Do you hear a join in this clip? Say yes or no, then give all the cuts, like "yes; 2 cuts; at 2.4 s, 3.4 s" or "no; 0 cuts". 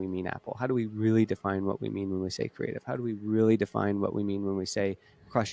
no; 0 cuts